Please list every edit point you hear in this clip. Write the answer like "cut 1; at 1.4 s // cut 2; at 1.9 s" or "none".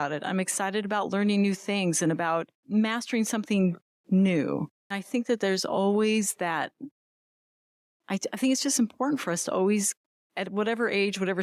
cut 1; at 2.6 s // cut 2; at 5.0 s